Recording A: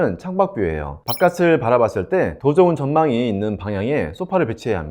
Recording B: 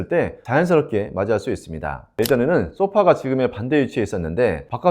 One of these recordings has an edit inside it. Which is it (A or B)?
B